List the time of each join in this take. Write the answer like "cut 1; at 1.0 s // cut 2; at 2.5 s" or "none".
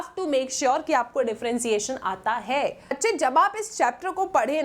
cut 1; at 2.9 s